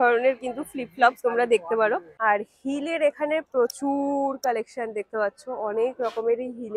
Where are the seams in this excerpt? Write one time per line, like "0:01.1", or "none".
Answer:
0:02.1